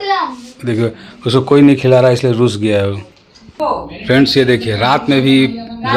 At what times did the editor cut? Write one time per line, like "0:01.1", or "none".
0:03.5